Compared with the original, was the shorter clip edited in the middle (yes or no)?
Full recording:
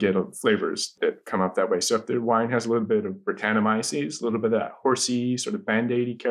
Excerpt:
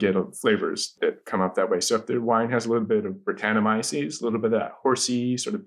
no